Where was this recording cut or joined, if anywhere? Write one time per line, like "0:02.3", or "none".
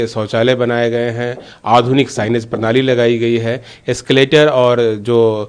none